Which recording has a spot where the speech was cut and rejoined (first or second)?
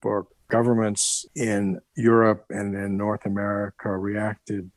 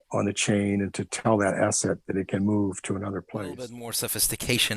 second